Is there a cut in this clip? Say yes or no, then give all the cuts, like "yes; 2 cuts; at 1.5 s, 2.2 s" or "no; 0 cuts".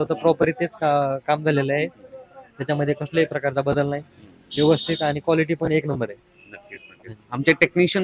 no; 0 cuts